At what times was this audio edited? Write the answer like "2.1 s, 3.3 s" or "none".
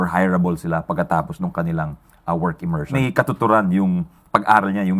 2.9 s